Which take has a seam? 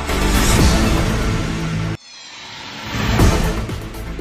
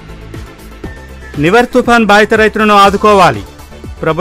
second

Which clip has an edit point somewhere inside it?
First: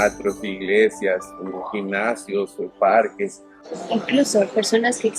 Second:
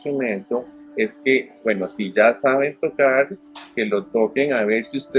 first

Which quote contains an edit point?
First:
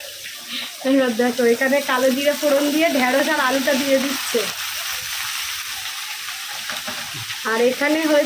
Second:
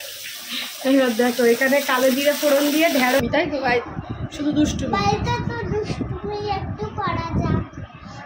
second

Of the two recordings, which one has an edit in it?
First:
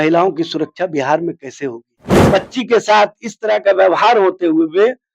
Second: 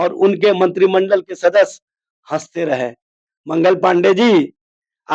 first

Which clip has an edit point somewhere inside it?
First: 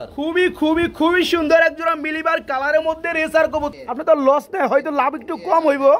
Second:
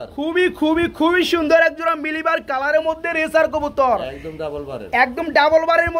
first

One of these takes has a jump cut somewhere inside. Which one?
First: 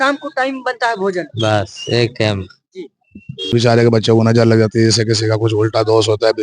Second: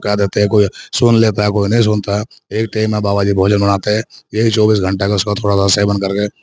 first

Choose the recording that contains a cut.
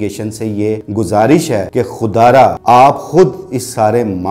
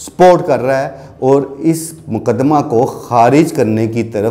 first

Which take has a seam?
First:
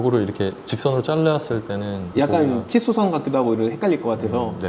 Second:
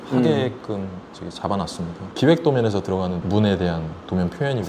second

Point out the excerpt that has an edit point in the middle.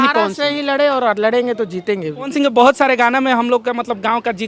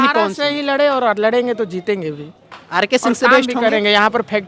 first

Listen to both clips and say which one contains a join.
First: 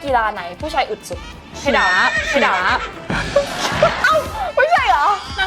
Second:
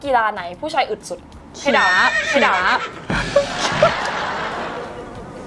first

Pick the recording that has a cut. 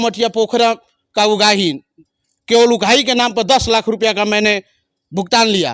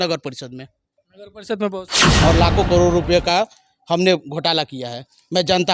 second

